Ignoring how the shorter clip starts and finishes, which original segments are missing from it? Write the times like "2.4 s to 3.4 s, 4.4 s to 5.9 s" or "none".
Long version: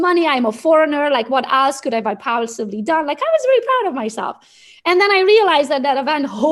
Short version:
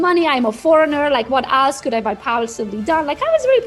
none